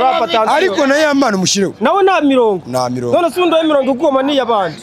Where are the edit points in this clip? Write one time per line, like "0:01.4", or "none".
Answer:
none